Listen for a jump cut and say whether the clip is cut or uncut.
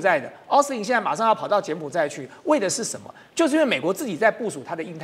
uncut